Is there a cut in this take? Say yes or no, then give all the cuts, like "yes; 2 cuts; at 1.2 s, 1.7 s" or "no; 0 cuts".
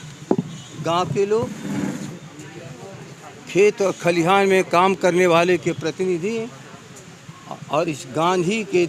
no; 0 cuts